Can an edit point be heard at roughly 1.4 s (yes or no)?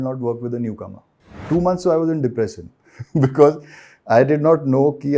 yes